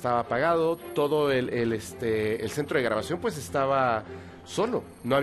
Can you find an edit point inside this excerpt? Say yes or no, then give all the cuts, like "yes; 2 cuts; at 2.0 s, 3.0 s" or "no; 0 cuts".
no; 0 cuts